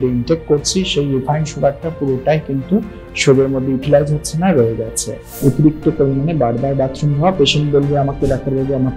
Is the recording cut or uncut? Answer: cut